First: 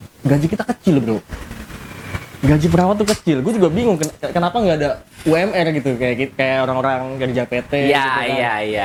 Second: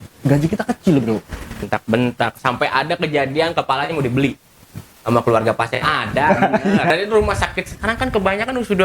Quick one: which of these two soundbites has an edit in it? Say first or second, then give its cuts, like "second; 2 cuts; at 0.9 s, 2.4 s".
second; 2 cuts; at 1.6 s, 6.9 s